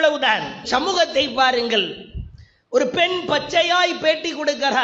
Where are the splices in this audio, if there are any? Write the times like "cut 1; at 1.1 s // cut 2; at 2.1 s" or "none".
none